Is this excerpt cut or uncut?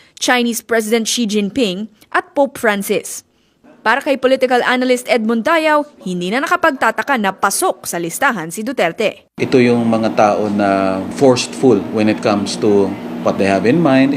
cut